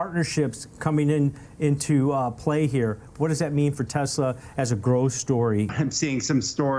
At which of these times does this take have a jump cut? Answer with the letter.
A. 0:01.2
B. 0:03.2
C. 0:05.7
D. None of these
C